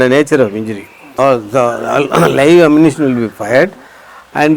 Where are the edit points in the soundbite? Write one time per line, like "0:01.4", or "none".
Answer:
0:01.1